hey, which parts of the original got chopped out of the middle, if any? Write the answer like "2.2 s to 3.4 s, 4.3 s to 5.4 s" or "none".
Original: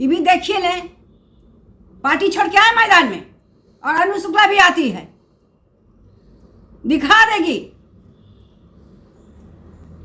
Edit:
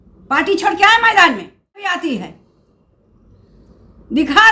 3.6 s to 4.6 s